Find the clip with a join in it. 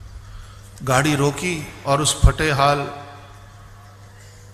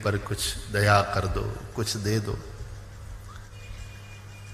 second; 1 cut; at 3.5 s

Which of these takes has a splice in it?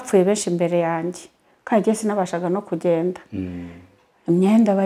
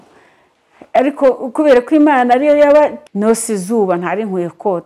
second; 1 cut; at 3.0 s

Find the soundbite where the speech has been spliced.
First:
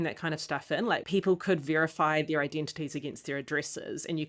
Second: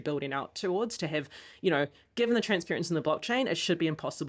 first; 1 cut; at 1.0 s

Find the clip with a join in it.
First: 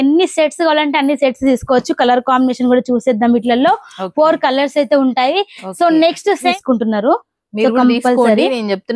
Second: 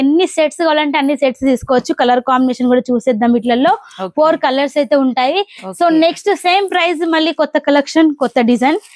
first; 1 cut; at 6.5 s

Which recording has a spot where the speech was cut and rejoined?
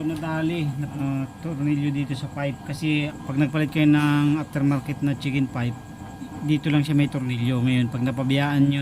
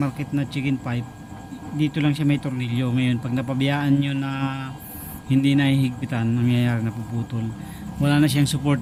first; 2 cuts; at 0.9 s, 3.2 s

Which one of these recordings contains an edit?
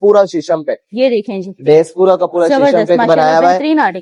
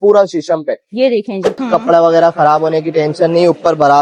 second; 1 cut; at 1.5 s

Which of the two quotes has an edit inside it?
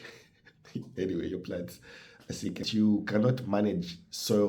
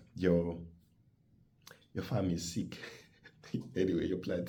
first; 1 cut; at 2.6 s

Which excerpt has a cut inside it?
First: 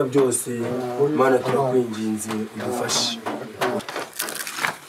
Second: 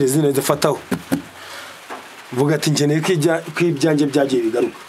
first; 1 cut; at 3.8 s

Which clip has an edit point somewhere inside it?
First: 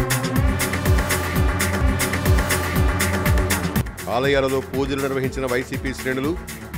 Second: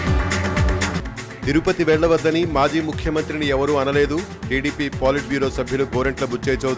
second; 1 cut; at 0.9 s

